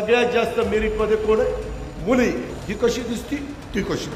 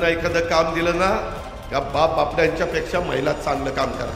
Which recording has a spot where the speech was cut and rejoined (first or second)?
first